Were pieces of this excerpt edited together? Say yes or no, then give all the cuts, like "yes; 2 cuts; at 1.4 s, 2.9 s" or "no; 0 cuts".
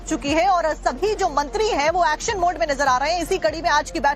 no; 0 cuts